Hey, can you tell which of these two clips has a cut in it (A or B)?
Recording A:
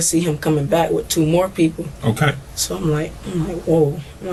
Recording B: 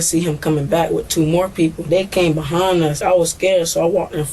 B